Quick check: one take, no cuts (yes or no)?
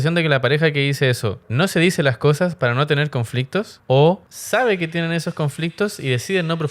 no